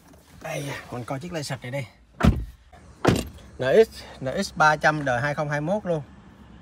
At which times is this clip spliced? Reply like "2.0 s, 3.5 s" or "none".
2.8 s